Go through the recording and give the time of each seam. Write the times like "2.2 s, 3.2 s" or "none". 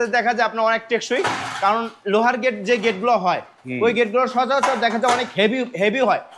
none